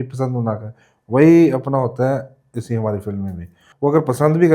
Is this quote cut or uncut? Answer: cut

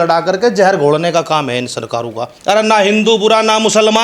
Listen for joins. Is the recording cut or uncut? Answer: cut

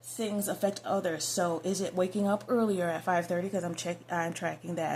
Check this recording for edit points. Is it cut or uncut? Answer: uncut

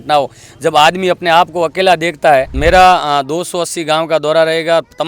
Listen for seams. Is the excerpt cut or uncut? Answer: cut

